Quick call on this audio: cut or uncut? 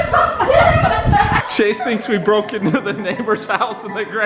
cut